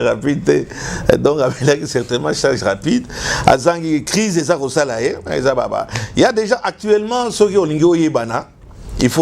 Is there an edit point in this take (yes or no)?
no